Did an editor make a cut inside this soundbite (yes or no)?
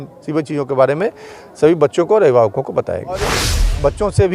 yes